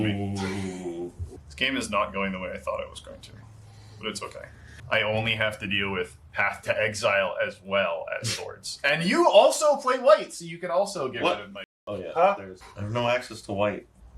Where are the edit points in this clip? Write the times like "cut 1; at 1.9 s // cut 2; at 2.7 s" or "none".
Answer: cut 1; at 1.2 s